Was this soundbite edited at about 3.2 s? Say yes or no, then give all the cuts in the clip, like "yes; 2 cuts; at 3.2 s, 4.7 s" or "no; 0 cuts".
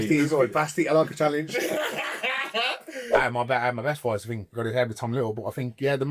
yes; 1 cut; at 3.2 s